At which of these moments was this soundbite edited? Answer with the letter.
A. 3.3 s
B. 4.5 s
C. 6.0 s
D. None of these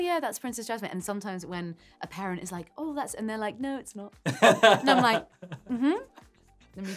D